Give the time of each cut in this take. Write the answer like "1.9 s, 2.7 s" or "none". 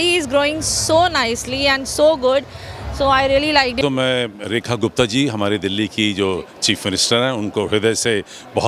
3.8 s